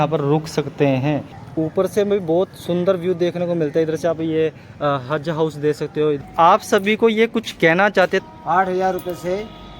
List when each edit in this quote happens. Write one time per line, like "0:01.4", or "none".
0:01.4
0:06.2
0:08.3

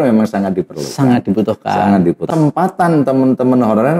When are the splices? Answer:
0:02.3

